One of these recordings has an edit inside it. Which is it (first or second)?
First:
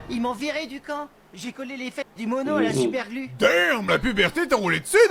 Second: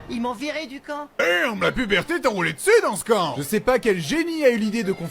second